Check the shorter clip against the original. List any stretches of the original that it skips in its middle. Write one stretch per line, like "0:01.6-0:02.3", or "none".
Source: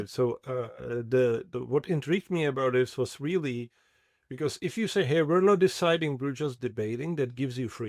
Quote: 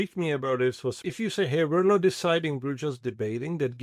0:03.1-0:04.6